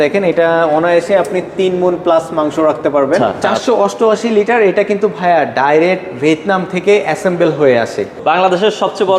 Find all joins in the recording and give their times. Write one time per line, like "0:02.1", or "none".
0:03.5
0:08.2